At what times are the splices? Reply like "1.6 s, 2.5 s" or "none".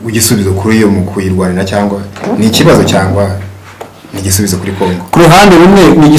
none